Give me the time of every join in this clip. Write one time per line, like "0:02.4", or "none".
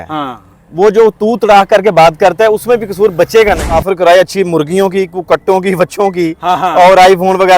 0:03.8